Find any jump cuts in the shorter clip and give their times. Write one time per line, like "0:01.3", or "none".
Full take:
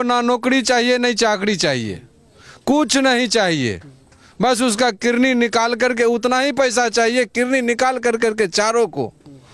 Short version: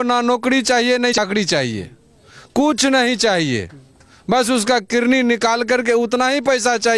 0:01.2